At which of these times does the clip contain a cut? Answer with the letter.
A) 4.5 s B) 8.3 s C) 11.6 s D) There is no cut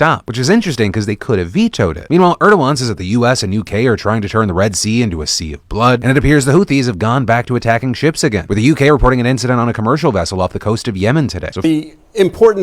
C